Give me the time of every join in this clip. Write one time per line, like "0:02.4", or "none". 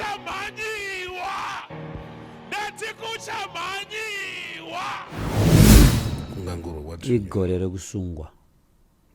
0:05.1
0:05.9